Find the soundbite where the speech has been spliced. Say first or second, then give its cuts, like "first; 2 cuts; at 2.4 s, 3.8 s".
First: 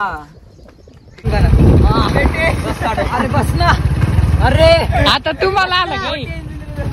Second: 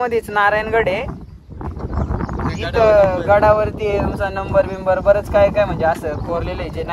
first; 1 cut; at 1.3 s